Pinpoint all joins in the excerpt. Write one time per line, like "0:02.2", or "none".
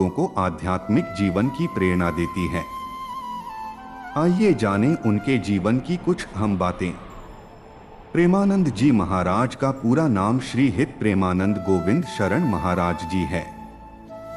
0:02.9
0:04.1